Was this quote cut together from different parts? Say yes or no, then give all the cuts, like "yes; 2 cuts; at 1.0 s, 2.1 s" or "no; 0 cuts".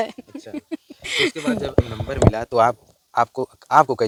no; 0 cuts